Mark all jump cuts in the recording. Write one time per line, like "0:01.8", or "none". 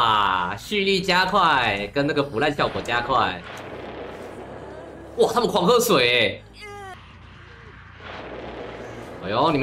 0:06.9